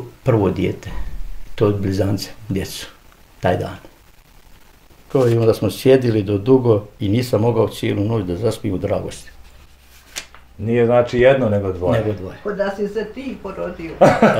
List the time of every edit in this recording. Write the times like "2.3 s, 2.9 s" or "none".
5.0 s